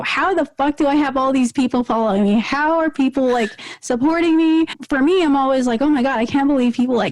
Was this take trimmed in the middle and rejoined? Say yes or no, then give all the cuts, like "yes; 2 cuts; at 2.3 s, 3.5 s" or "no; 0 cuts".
yes; 1 cut; at 4.8 s